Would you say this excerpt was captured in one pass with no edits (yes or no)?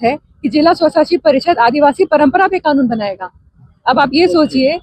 yes